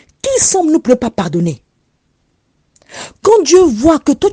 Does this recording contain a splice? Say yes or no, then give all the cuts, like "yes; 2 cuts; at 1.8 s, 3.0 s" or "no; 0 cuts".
no; 0 cuts